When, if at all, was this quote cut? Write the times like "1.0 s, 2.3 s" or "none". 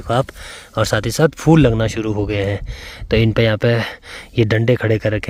none